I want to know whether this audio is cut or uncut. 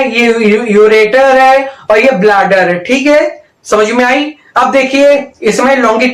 uncut